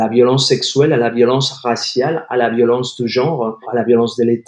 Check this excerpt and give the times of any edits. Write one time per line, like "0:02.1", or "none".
0:03.6